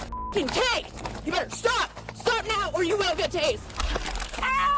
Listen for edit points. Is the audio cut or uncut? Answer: cut